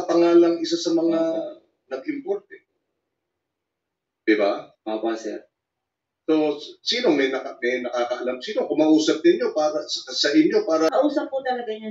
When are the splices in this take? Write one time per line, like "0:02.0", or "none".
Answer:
0:10.9